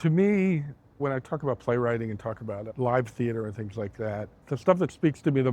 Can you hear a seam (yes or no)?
yes